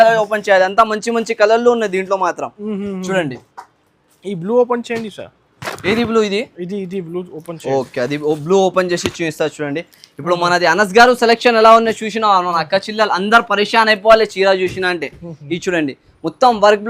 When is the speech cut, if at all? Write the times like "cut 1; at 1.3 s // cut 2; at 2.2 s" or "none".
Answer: none